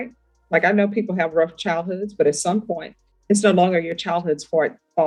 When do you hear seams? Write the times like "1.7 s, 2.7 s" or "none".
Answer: none